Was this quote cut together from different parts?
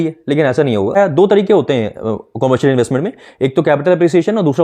yes; 1 cut; at 1.0 s

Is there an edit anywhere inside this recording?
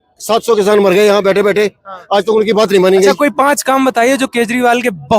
yes; 1 cut; at 3.1 s

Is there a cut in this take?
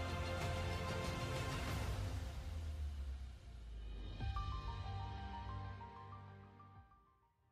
no; 0 cuts

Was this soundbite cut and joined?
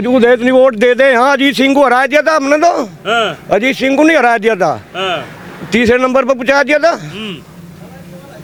no; 0 cuts

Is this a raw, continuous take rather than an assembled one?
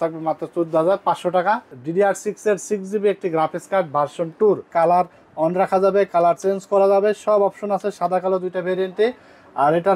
no; 2 cuts; at 1.8 s, 4.7 s

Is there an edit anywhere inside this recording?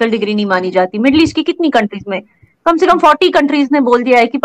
no; 0 cuts

